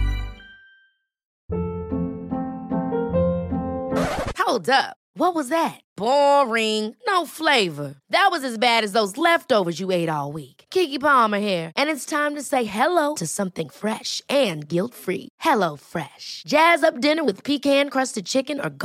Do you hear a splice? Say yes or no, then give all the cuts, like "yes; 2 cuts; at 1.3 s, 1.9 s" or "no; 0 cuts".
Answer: yes; 1 cut; at 1.3 s